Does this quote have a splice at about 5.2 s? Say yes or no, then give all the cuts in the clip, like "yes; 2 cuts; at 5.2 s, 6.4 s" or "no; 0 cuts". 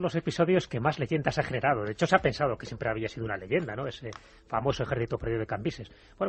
no; 0 cuts